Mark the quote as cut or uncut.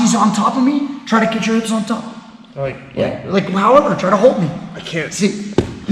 uncut